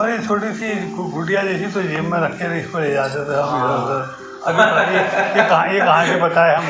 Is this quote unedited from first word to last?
yes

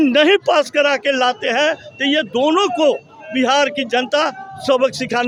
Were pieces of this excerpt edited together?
no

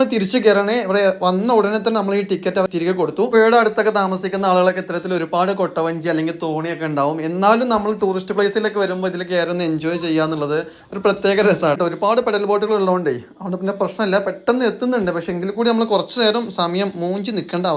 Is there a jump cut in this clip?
yes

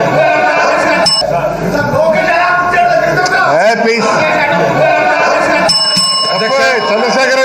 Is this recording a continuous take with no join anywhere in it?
yes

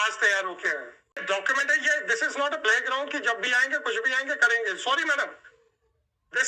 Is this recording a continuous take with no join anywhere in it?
no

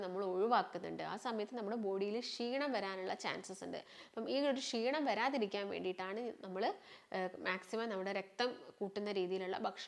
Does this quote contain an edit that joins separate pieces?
no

